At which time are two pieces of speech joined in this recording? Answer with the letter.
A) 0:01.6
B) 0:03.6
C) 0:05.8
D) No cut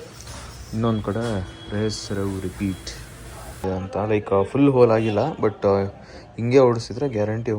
B